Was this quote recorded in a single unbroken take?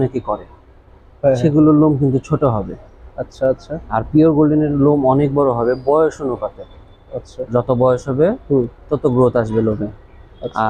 yes; 0 cuts

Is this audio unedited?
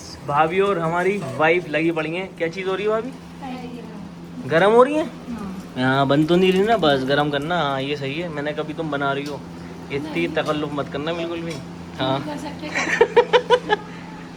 yes; 0 cuts

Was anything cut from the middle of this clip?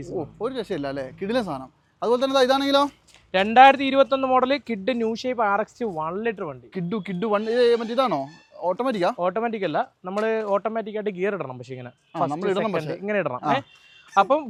no; 0 cuts

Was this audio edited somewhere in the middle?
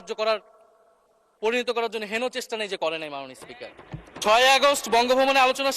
yes; 1 cut; at 4.1 s

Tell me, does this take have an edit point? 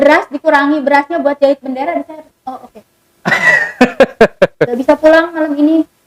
yes; 1 cut; at 4.8 s

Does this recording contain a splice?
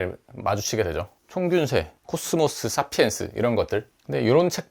yes; 1 cut; at 1.1 s

